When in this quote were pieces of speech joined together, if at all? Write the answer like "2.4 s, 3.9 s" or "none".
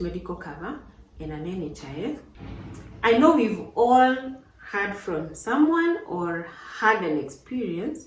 2.3 s

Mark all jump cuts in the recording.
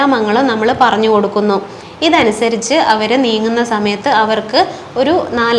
none

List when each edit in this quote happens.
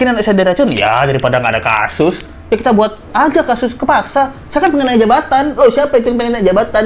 2.3 s

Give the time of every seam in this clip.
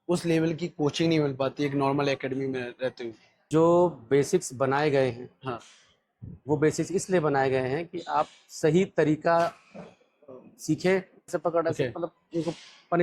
3.3 s, 11.3 s

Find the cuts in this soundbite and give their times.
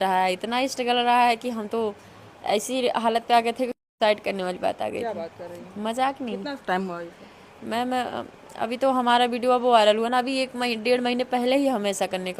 none

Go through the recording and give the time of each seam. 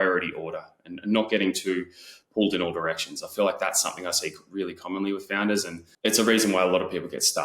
5.8 s

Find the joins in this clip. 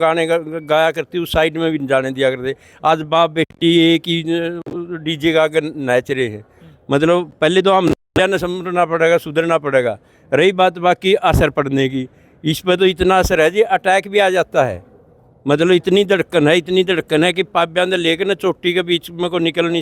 none

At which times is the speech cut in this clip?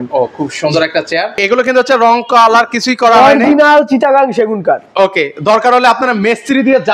1.3 s

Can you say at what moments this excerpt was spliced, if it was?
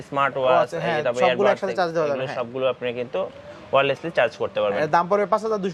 none

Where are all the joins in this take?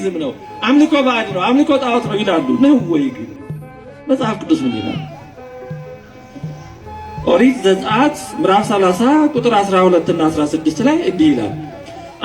none

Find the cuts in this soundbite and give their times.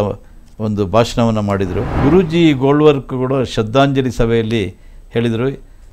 1.9 s

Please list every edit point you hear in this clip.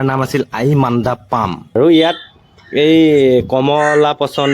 1.7 s

